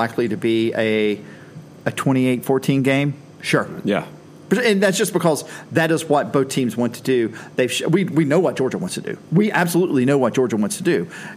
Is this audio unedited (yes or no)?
yes